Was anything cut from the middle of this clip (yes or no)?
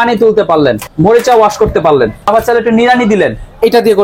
yes